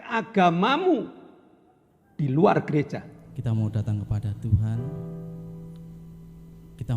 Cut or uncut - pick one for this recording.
cut